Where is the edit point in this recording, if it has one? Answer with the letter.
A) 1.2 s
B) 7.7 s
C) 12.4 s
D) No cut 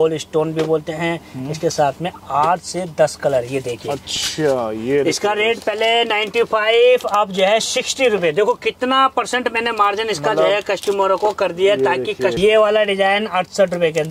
C